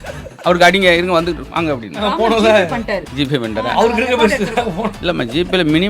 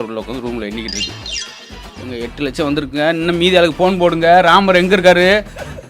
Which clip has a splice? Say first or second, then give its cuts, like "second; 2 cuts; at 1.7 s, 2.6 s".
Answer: first; 1 cut; at 2.0 s